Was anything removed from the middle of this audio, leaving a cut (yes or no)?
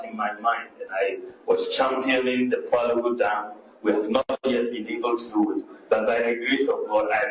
no